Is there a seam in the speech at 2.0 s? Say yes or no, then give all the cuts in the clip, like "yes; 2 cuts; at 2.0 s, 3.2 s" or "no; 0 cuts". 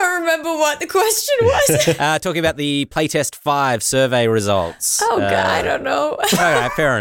yes; 1 cut; at 2.0 s